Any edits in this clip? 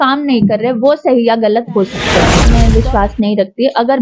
yes; 1 cut; at 2.5 s

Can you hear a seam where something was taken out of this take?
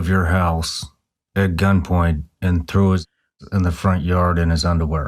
no; 0 cuts

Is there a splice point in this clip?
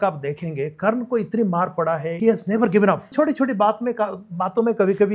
yes; 2 cuts; at 2.1 s, 3.1 s

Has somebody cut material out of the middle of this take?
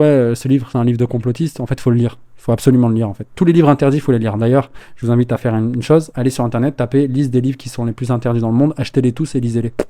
no; 0 cuts

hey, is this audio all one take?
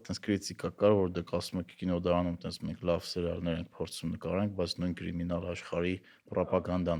yes; 0 cuts

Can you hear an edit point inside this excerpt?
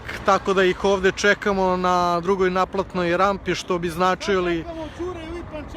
no; 0 cuts

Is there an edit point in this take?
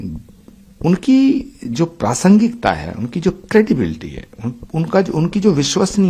no; 0 cuts

